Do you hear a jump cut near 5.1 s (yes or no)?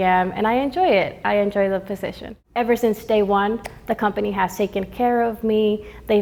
no